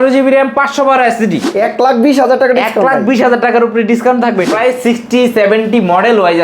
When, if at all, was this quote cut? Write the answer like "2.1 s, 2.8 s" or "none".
1.5 s, 4.5 s